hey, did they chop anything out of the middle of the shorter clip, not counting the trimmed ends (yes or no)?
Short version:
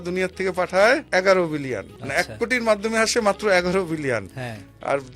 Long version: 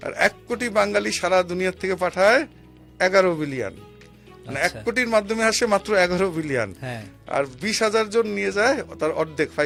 yes